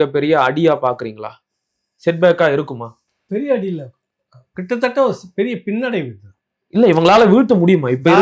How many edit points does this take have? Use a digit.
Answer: 0